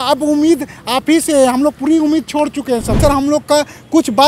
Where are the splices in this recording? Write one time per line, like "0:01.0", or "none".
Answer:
0:03.0